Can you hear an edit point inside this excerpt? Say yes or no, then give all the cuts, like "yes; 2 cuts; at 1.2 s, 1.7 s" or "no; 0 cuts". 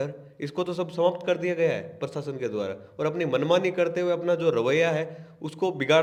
no; 0 cuts